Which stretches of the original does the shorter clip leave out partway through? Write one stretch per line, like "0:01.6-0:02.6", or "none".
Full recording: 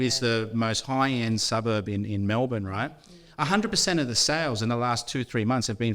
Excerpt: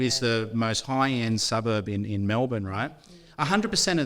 none